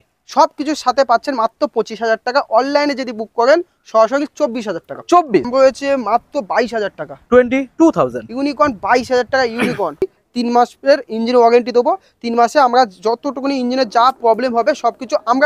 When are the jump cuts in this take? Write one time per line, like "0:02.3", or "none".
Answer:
0:05.5
0:10.0